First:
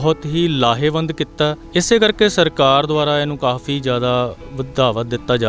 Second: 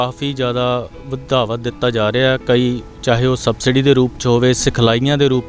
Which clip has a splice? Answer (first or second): first